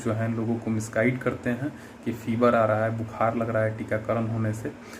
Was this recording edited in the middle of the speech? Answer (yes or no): no